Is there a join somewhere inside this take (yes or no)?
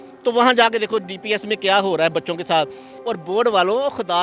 yes